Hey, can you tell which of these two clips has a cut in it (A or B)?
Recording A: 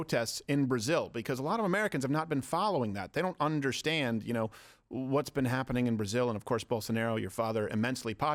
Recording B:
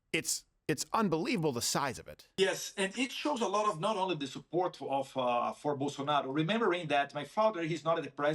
B